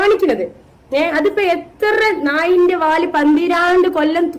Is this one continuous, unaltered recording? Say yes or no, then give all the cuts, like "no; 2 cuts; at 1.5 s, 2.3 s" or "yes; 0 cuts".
yes; 0 cuts